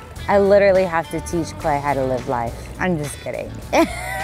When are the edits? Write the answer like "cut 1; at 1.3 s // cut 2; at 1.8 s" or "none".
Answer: cut 1; at 2.7 s